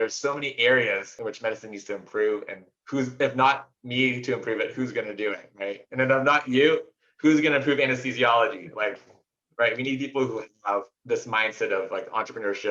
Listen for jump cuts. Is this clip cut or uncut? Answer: cut